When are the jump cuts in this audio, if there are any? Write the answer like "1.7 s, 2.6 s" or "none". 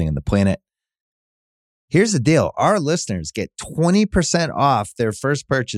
none